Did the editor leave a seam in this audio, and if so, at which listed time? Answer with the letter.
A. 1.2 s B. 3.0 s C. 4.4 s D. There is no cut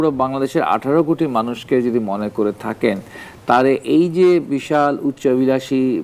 D